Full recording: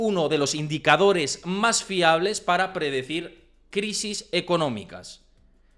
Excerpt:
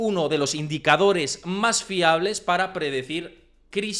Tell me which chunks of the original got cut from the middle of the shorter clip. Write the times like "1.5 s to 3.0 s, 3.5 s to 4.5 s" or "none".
none